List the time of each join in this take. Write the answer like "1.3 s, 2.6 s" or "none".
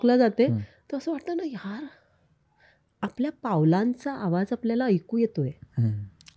none